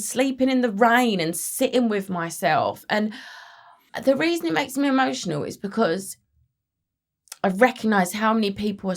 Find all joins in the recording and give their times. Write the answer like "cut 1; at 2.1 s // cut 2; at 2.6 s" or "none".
cut 1; at 3.9 s